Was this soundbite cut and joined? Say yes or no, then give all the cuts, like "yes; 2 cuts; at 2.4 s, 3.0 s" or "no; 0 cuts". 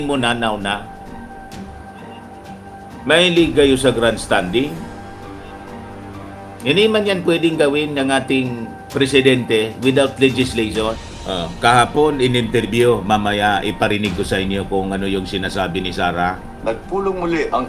yes; 1 cut; at 11.1 s